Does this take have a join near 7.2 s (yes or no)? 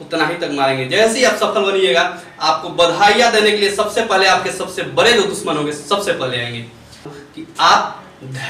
yes